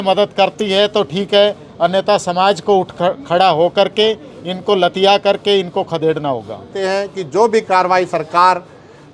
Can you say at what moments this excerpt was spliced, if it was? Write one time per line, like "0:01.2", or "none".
0:06.7